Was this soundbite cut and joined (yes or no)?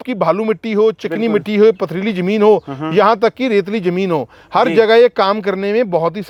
no